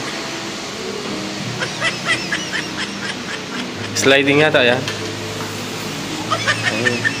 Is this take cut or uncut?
uncut